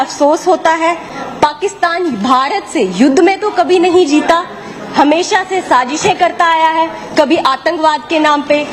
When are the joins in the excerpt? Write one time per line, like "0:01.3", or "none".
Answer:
none